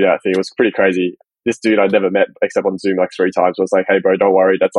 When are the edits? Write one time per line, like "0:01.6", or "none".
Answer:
0:01.2